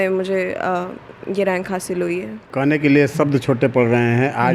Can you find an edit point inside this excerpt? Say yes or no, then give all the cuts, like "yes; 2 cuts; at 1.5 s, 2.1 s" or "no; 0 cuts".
yes; 1 cut; at 2.5 s